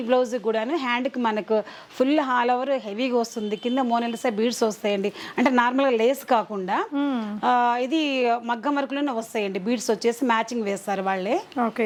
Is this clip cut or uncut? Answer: uncut